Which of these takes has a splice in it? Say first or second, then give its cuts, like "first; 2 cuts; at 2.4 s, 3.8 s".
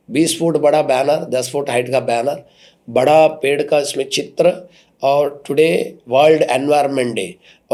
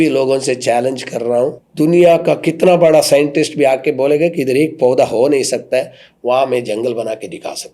second; 1 cut; at 1.6 s